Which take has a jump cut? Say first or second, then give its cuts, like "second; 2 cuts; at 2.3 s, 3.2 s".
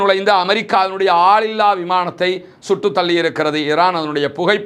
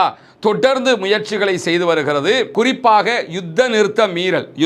second; 1 cut; at 2.5 s